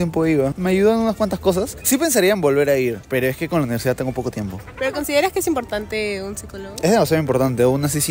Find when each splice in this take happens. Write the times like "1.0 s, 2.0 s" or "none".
none